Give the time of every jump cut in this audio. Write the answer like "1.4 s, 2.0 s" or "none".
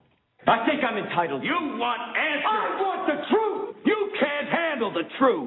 4.1 s

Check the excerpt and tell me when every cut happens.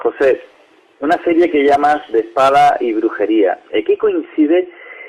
3.3 s

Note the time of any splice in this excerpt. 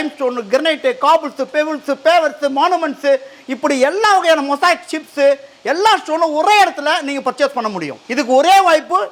none

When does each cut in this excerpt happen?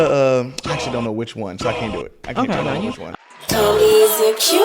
3.1 s

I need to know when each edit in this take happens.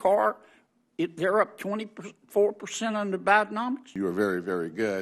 3.9 s

